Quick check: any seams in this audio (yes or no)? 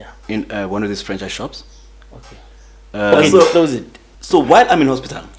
yes